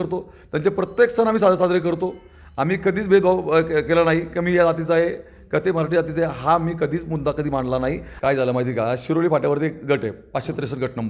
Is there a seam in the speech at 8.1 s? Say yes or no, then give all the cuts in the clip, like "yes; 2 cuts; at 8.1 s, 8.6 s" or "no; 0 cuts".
yes; 1 cut; at 8.1 s